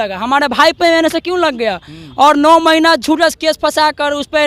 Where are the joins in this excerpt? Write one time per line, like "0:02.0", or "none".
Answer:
none